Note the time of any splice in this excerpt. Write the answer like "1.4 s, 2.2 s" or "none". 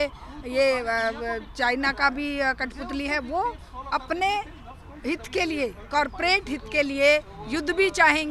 none